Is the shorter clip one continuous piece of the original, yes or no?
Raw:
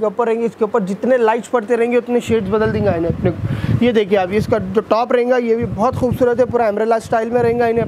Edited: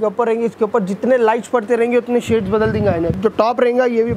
no